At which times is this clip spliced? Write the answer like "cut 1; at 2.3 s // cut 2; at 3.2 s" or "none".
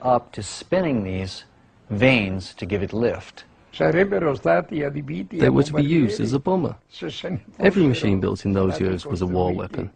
none